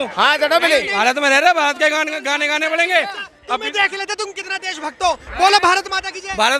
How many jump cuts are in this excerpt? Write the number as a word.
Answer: one